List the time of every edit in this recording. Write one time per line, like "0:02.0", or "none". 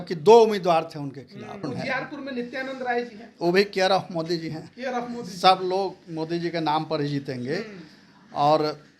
0:01.7